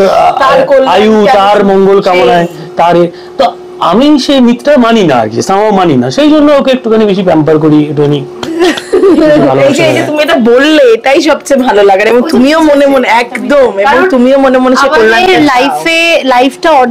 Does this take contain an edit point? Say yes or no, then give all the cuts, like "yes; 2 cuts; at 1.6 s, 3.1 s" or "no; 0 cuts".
no; 0 cuts